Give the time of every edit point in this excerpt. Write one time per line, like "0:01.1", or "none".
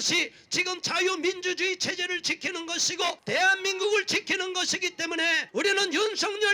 0:03.2
0:05.4